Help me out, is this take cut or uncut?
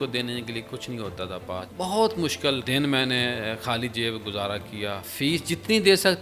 cut